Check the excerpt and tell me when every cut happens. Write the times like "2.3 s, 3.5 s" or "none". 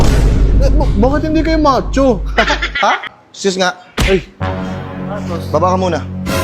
3.0 s

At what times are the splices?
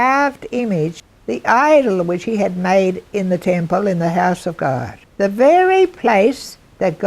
1.1 s, 5.0 s

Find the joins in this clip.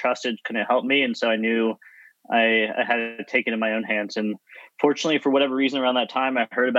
none

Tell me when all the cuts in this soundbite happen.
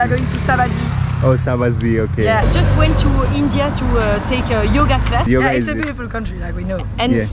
2.5 s, 5.3 s

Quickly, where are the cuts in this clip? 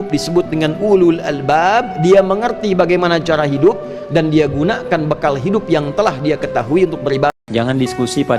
7.4 s

